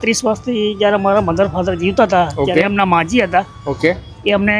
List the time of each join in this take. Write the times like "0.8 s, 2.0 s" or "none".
none